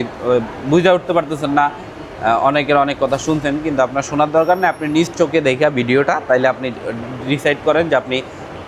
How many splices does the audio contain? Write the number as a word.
zero